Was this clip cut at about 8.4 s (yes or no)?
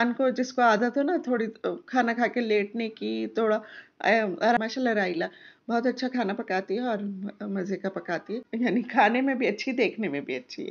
yes